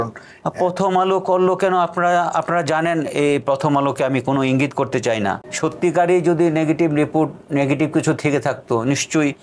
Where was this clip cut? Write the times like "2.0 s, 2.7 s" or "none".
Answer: 5.4 s